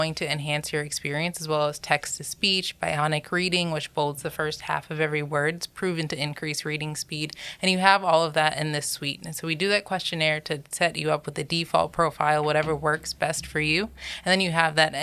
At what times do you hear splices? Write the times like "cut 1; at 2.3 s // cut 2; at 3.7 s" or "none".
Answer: none